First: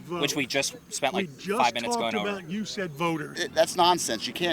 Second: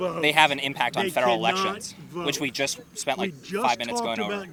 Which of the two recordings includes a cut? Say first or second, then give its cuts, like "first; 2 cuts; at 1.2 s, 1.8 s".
first; 1 cut; at 3.4 s